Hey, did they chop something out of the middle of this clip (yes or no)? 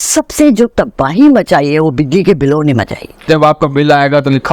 yes